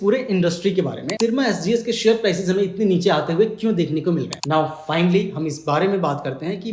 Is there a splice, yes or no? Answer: yes